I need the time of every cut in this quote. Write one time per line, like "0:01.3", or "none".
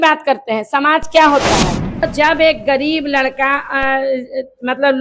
0:02.0